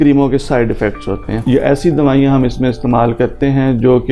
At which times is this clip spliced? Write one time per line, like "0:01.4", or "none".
0:01.3